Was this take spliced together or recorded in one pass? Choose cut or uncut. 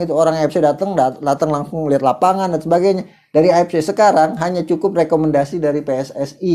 uncut